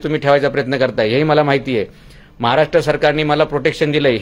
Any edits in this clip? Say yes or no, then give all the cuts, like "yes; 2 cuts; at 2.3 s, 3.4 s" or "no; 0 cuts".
no; 0 cuts